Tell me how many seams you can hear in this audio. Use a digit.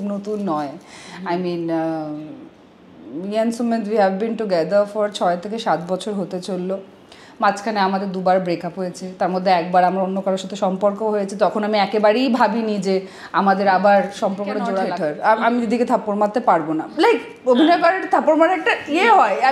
1